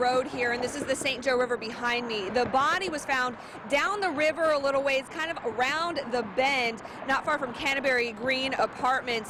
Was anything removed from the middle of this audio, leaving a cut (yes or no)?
no